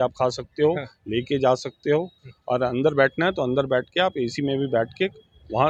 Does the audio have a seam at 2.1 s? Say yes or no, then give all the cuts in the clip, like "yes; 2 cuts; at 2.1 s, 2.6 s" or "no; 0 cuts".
no; 0 cuts